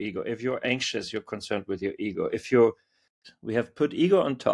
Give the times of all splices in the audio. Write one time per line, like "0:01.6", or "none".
0:03.2